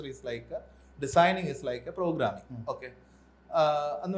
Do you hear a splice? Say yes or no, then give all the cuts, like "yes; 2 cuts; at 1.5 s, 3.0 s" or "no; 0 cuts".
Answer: no; 0 cuts